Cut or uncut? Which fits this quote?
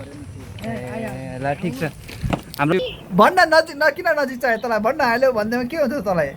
cut